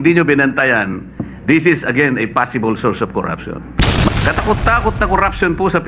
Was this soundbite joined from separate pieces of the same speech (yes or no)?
yes